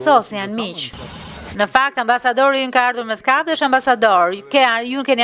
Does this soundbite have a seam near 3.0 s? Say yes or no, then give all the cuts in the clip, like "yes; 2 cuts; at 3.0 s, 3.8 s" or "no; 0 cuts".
no; 1 cut; at 1.4 s